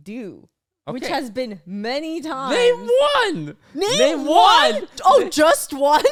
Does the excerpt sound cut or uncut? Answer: uncut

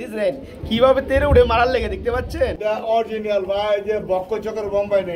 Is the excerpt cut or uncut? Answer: cut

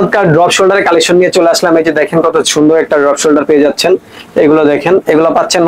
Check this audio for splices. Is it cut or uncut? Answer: uncut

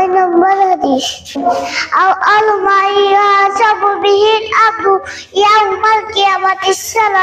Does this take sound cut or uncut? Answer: uncut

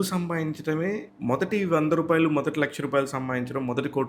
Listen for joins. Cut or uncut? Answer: cut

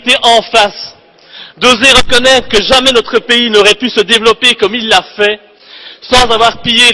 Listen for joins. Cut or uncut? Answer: uncut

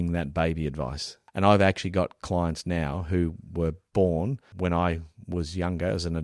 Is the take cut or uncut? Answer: cut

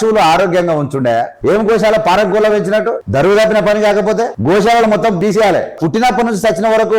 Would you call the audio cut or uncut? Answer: cut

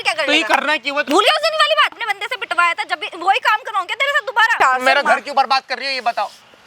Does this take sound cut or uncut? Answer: cut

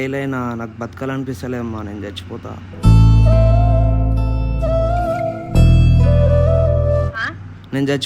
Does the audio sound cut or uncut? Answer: uncut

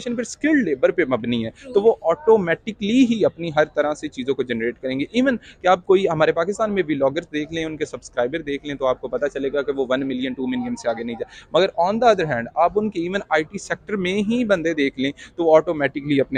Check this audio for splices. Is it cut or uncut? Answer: uncut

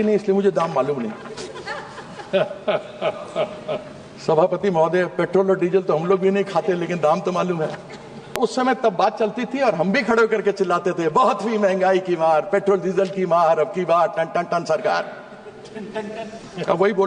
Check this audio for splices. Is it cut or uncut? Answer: cut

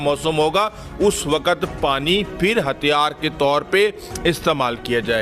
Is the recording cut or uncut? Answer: uncut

